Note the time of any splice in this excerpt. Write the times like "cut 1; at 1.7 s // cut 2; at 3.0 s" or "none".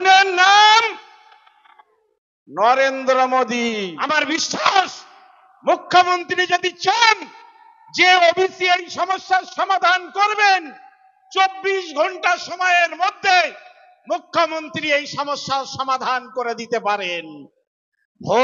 cut 1; at 4.1 s

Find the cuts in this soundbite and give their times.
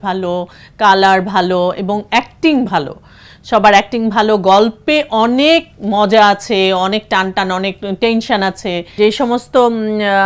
cut 1; at 8.9 s

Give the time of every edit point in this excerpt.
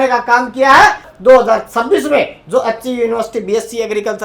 cut 1; at 1.1 s

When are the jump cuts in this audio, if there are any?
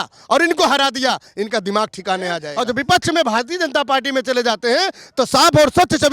cut 1; at 2.5 s

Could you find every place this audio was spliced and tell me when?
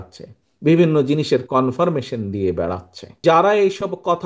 cut 1; at 3.2 s

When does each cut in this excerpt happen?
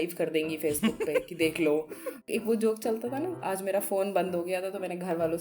cut 1; at 2.3 s // cut 2; at 3.4 s

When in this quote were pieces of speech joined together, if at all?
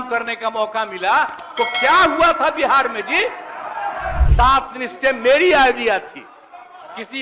cut 1; at 4.2 s

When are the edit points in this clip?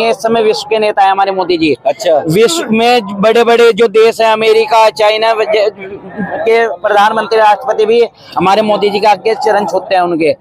none

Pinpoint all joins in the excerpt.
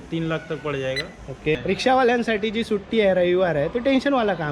cut 1; at 1.6 s

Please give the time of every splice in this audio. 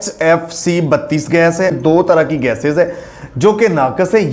cut 1; at 1.8 s

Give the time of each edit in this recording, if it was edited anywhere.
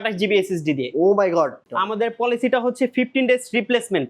cut 1; at 1.7 s

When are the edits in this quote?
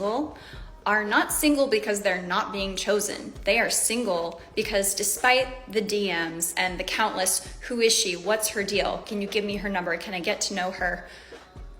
cut 1; at 2.7 s // cut 2; at 9.3 s

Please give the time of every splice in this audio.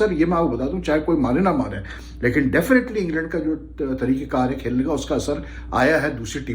none

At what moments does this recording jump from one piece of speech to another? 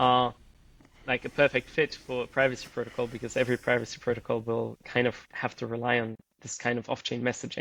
none

